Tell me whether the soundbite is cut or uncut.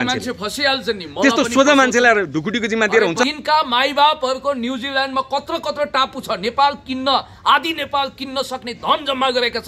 cut